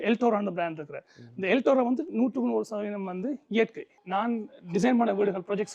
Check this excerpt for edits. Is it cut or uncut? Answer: cut